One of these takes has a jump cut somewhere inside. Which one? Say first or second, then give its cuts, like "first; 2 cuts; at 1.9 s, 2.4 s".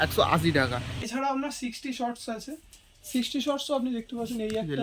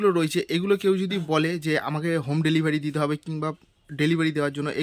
first; 1 cut; at 1.0 s